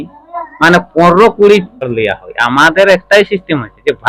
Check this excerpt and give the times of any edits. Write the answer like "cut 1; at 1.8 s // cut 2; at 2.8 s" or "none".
cut 1; at 2.0 s